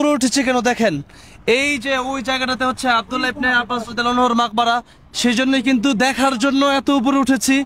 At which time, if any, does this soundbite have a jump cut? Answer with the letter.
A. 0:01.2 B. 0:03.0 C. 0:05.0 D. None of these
D